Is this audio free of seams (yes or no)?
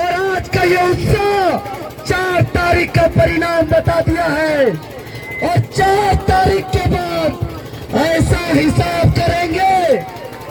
yes